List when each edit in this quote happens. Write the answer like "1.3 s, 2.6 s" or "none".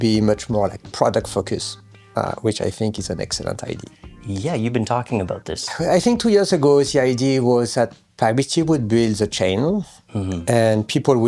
none

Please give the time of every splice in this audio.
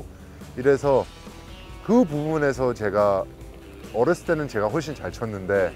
none

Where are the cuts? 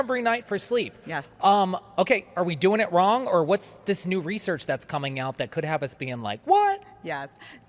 none

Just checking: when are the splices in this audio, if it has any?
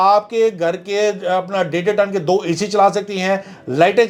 none

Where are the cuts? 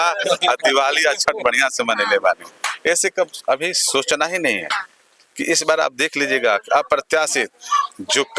none

